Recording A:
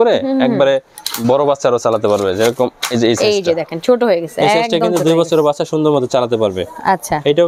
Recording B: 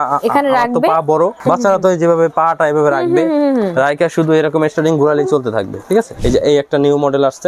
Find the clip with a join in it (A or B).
B